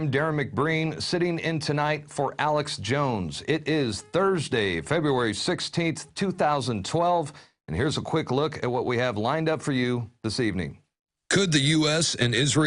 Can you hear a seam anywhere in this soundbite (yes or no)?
yes